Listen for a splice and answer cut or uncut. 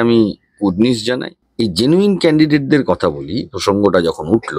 cut